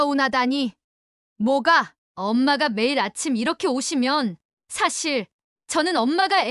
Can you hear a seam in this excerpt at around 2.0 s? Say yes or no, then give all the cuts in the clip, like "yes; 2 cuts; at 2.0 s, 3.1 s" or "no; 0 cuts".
yes; 1 cut; at 2.0 s